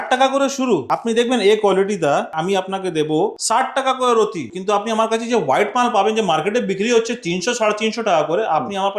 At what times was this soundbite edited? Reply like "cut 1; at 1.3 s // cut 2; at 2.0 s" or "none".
cut 1; at 0.9 s // cut 2; at 2.3 s // cut 3; at 3.4 s // cut 4; at 4.5 s